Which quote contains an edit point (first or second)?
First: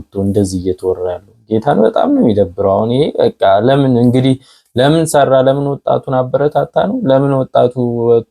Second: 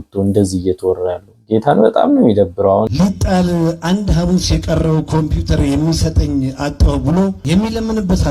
second